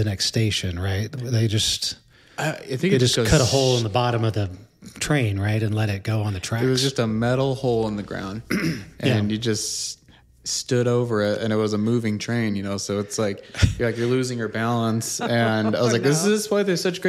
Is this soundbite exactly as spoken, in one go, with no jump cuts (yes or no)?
yes